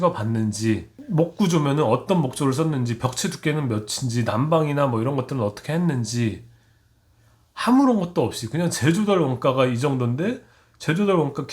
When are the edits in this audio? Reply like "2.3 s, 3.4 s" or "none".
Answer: 0.9 s